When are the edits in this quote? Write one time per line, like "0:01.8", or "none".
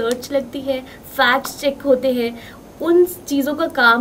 none